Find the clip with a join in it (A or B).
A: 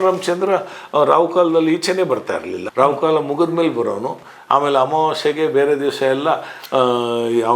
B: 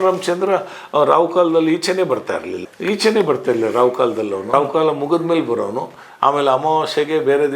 A